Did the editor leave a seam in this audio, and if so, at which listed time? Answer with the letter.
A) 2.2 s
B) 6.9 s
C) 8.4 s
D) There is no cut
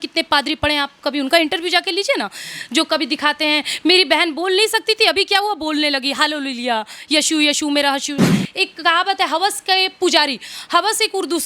C